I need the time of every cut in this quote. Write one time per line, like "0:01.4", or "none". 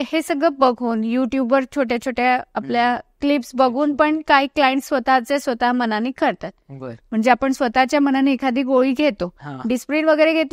none